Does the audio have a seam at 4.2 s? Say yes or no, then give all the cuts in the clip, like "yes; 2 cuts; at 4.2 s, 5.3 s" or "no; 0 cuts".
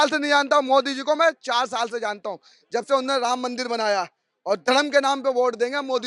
no; 0 cuts